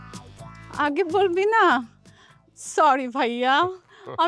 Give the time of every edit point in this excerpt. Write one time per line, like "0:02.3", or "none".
none